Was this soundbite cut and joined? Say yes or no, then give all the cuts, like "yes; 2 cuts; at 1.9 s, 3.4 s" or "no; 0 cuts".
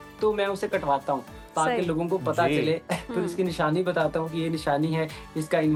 no; 0 cuts